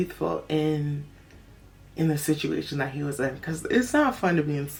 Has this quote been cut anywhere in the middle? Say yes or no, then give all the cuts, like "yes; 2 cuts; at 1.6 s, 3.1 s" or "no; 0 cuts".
no; 0 cuts